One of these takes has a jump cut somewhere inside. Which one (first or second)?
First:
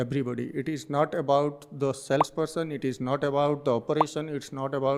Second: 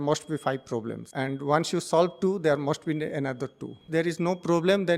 second